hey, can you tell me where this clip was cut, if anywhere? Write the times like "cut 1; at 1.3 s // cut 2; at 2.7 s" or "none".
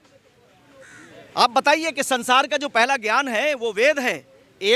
none